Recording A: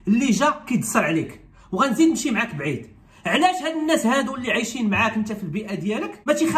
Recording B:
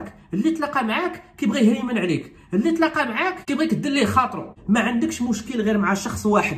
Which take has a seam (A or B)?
B